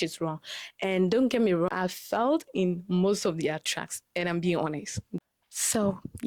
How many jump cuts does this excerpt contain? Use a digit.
2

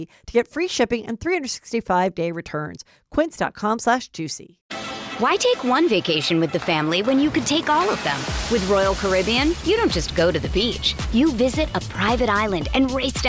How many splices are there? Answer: 1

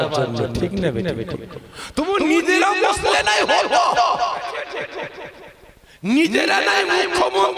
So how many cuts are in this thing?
1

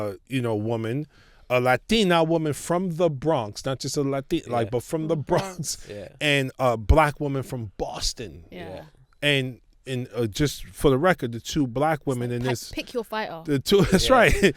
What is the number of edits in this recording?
0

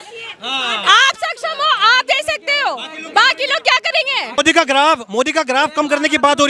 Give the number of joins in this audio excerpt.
1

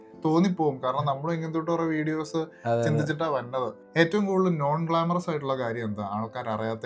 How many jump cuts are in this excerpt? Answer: 1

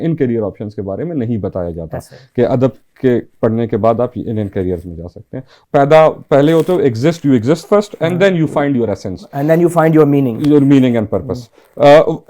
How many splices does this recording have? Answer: 1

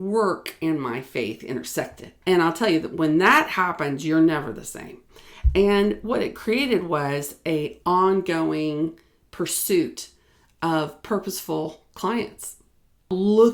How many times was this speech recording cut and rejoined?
1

